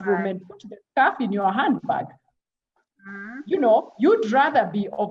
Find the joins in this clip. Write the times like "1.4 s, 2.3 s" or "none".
none